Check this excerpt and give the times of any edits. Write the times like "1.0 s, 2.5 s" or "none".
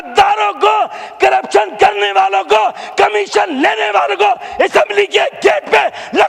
none